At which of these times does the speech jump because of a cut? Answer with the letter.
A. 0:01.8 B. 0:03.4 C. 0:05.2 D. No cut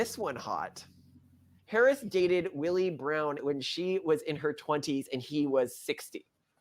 B